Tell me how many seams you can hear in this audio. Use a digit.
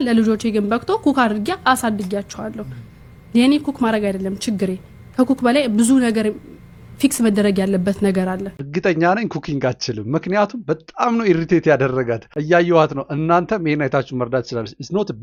0